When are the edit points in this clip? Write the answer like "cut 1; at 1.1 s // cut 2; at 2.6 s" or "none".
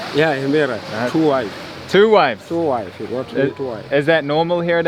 none